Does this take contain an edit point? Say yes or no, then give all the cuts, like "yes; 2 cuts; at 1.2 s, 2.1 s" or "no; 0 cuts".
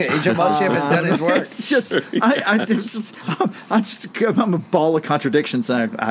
no; 0 cuts